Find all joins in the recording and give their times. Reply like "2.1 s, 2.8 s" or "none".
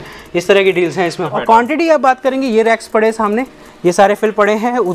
1.3 s